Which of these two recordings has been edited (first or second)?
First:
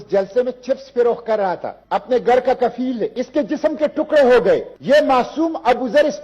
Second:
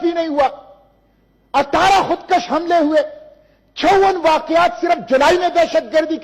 first